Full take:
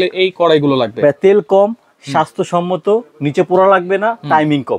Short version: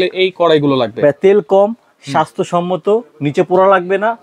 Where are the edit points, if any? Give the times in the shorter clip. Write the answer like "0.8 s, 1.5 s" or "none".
none